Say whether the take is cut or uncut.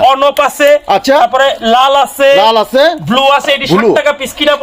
uncut